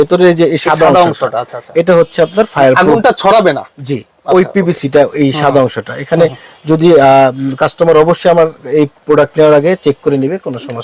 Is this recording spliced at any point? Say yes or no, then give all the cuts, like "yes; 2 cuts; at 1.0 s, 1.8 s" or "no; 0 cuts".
no; 0 cuts